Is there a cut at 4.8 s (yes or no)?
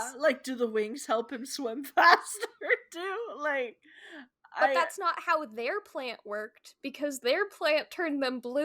yes